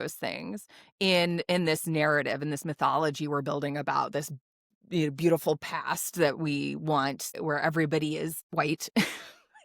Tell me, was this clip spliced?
yes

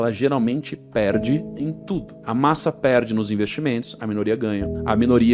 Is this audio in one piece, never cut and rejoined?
yes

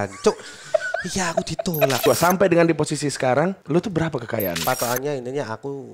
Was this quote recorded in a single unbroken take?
no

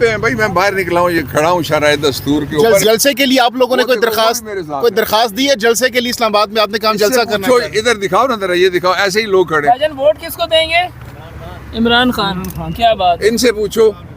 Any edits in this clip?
yes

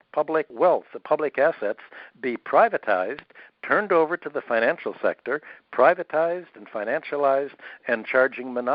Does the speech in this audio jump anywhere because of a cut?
no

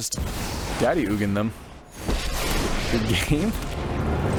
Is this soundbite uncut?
yes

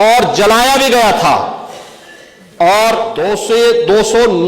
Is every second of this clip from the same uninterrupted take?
no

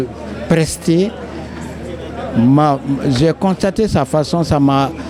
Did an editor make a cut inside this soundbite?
no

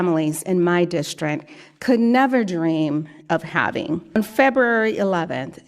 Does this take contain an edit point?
yes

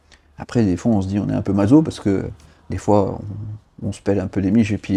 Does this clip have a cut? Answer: no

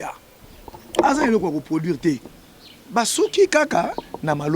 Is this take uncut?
no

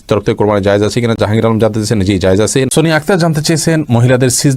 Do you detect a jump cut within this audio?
no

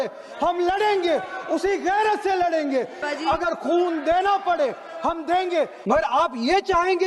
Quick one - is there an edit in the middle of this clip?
yes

